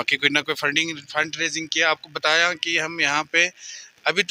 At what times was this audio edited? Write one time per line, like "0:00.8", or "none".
none

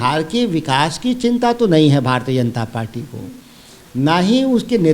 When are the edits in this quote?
none

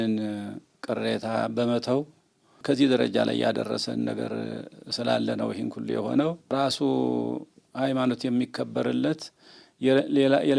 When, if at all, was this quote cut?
0:02.5
0:06.4

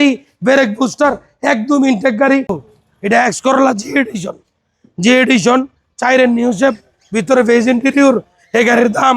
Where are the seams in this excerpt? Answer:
0:02.6

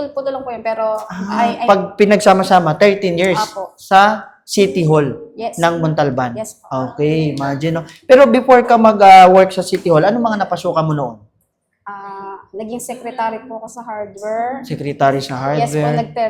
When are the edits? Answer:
none

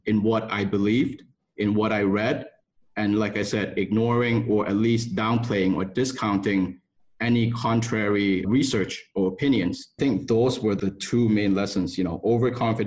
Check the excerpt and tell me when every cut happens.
0:08.4
0:09.9
0:10.8

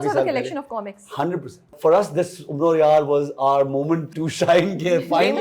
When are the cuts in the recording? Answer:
0:01.7
0:04.2

